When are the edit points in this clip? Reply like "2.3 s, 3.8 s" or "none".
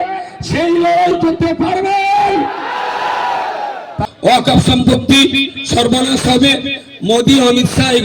4.0 s

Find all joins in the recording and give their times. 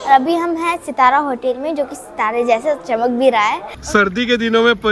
3.7 s

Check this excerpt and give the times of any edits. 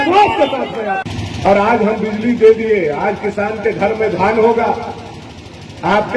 1.0 s

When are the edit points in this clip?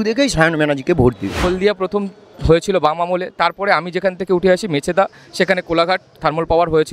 1.4 s

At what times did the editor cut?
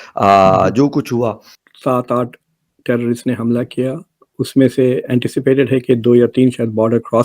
1.5 s, 4.3 s

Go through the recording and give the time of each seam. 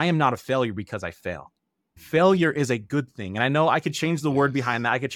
none

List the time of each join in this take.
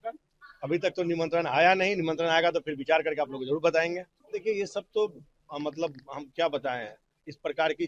4.1 s

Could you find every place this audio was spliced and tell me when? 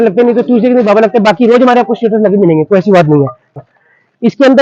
3.5 s

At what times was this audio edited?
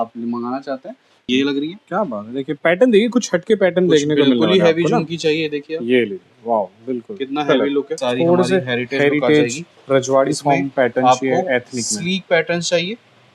1.2 s, 7.9 s

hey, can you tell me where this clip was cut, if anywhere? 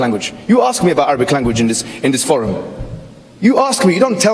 none

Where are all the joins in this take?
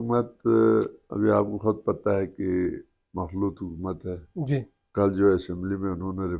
1.0 s, 4.8 s

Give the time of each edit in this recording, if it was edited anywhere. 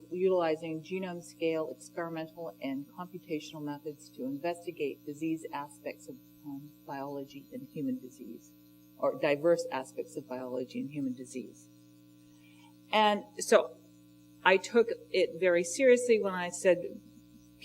5.4 s

